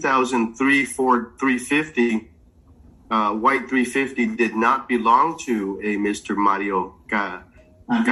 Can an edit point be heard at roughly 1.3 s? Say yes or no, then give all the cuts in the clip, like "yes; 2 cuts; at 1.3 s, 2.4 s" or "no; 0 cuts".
no; 0 cuts